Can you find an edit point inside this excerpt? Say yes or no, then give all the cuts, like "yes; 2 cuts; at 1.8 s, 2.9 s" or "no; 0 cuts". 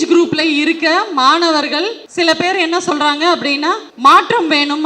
yes; 2 cuts; at 2.0 s, 3.9 s